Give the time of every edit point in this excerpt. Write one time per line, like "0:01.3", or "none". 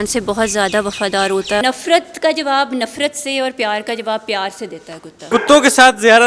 0:01.6
0:05.1